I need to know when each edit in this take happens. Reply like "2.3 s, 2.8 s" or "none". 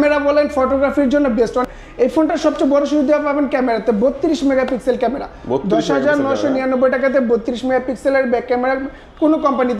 1.7 s